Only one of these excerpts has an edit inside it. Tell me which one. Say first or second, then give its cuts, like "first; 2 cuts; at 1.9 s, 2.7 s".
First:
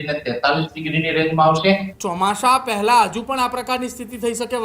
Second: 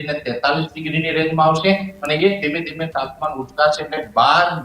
first; 1 cut; at 1.9 s